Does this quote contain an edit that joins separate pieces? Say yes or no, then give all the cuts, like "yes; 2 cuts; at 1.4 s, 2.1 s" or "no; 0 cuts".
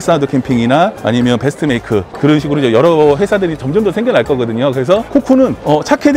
no; 0 cuts